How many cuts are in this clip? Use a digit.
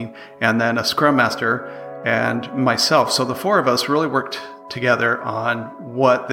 0